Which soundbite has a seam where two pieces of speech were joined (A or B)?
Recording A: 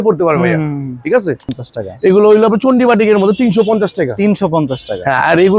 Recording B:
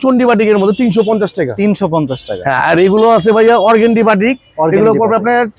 A